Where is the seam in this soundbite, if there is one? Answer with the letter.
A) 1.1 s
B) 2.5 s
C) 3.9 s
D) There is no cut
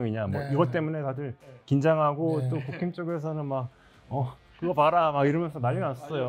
D